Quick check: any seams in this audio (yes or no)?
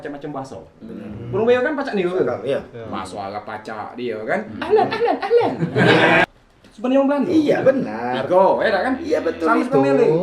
yes